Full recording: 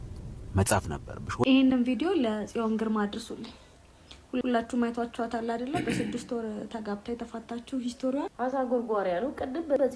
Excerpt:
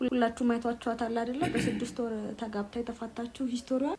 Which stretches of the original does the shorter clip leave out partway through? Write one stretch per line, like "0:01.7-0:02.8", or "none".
none